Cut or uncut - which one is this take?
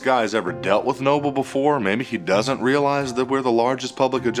uncut